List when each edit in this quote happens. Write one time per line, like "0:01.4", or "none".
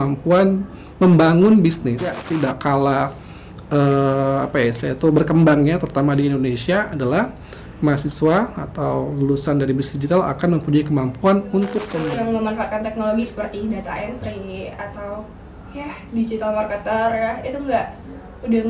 0:02.2
0:11.9